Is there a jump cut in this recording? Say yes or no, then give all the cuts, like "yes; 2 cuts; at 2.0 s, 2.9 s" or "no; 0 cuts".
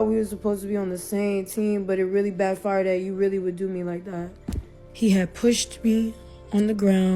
yes; 1 cut; at 4.8 s